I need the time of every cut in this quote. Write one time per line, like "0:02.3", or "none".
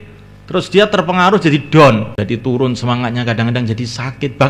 0:02.1